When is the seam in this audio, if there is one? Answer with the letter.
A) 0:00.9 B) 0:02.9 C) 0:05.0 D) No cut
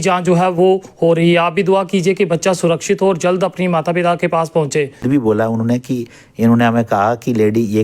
C